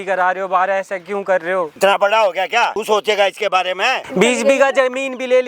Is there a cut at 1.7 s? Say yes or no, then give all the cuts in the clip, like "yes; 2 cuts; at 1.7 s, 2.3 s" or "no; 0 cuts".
yes; 3 cuts; at 1.7 s, 2.8 s, 4.0 s